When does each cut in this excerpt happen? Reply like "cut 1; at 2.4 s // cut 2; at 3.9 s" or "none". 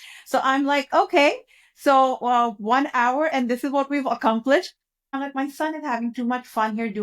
cut 1; at 5.1 s